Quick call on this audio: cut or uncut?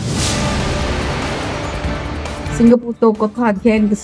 uncut